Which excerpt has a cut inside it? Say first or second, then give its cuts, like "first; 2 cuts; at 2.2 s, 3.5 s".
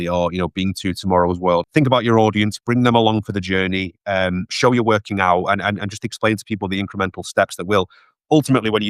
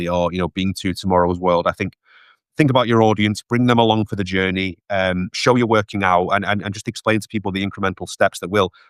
first; 1 cut; at 1.7 s